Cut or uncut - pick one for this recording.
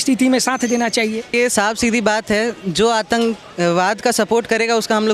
cut